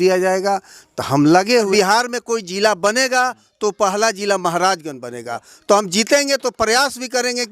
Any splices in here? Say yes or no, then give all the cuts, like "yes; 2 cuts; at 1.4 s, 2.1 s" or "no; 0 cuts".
yes; 1 cut; at 1.7 s